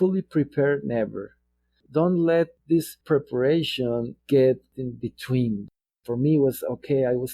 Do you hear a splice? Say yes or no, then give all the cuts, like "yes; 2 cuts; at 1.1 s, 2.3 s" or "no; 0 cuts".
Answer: yes; 2 cuts; at 2.6 s, 5.7 s